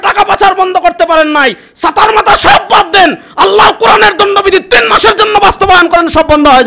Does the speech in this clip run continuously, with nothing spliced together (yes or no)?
yes